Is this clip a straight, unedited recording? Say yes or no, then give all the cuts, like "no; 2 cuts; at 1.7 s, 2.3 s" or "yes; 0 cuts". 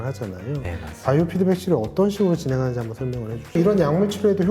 no; 1 cut; at 3.4 s